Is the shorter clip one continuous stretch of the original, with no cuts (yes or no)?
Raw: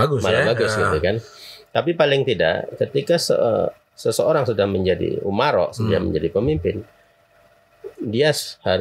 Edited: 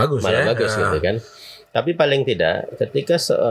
yes